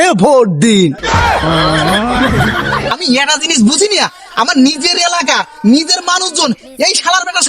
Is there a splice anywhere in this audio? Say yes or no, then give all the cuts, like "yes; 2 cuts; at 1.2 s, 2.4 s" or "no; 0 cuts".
yes; 1 cut; at 2.9 s